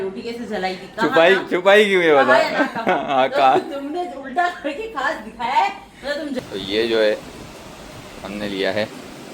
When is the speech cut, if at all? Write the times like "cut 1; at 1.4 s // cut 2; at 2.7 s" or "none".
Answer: cut 1; at 6.5 s